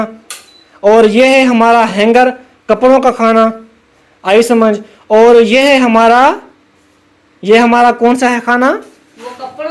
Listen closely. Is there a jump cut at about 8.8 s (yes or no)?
no